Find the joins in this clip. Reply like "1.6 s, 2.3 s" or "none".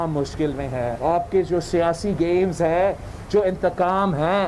1.0 s